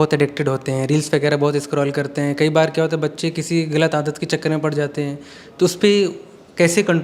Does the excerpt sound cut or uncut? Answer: uncut